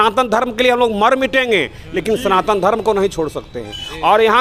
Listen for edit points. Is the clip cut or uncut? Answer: uncut